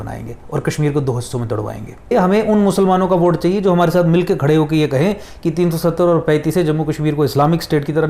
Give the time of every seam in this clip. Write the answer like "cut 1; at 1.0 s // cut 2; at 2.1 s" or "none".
cut 1; at 2.1 s